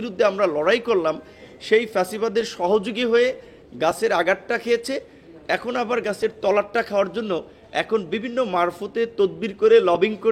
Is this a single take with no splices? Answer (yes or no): yes